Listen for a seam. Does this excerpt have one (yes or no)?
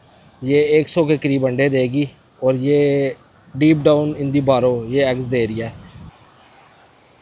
no